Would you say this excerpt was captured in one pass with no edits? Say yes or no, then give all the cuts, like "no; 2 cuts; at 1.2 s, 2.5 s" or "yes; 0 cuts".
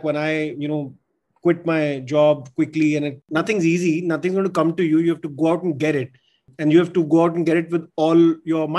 no; 1 cut; at 3.2 s